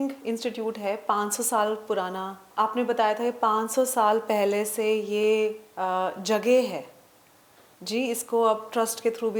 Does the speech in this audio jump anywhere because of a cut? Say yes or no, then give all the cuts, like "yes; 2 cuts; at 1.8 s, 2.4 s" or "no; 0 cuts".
no; 0 cuts